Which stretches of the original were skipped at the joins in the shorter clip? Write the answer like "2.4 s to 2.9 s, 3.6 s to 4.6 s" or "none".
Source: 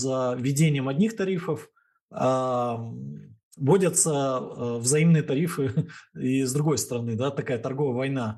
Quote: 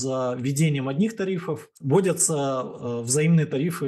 1.7 s to 3.4 s